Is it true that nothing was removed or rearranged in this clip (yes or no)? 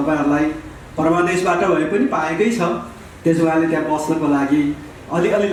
yes